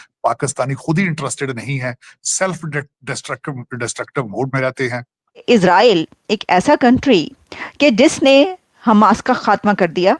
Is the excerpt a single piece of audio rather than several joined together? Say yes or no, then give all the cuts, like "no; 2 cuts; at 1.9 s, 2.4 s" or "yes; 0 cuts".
no; 1 cut; at 5.4 s